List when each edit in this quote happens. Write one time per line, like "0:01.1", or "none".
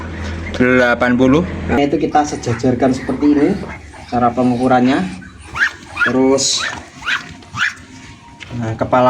0:01.8